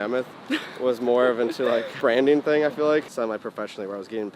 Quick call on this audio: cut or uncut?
cut